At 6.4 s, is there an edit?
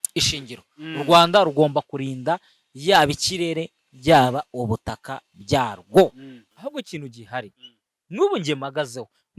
yes; 1 cut; at 6.4 s

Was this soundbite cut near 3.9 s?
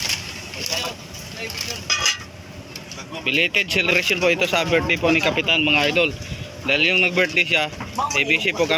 yes; 1 cut; at 3.9 s

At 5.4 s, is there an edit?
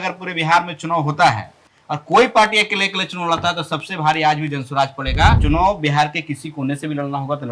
yes; 1 cut; at 5.4 s

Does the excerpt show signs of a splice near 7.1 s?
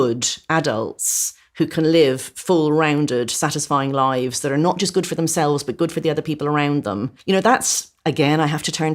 yes; 1 cut; at 7.1 s

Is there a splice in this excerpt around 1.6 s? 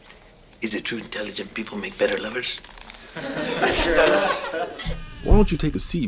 no; 1 cut; at 4.7 s

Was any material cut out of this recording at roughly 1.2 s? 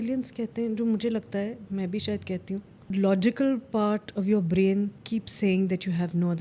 no; 2 cuts; at 2.9 s, 5.0 s

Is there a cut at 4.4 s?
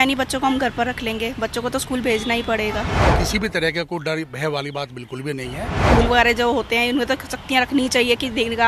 no; 2 cuts; at 3.0 s, 5.8 s

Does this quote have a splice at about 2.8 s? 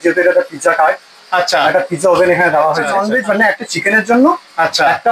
yes; 1 cut; at 2.8 s

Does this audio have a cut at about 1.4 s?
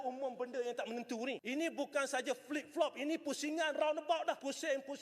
yes; 1 cut; at 1.4 s

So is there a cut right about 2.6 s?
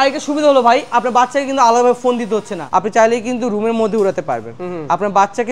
yes; 1 cut; at 2.6 s

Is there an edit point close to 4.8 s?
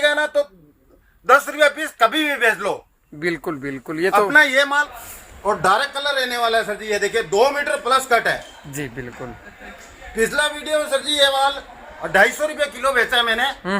yes; 1 cut; at 4.8 s

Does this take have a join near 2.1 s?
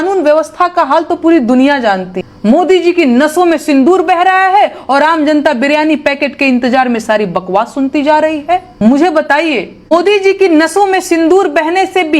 yes; 2 cuts; at 2.1 s, 8.7 s

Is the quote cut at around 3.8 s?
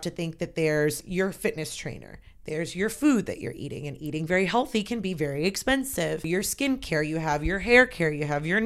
no; 2 cuts; at 1.0 s, 6.3 s

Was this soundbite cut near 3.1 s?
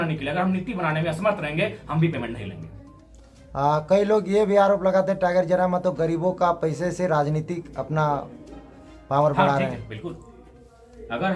no; 0 cuts

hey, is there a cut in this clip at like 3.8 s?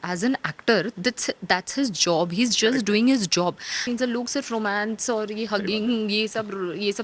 yes; 1 cut; at 3.8 s

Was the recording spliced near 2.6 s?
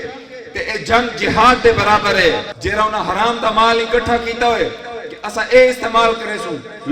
yes; 1 cut; at 2.6 s

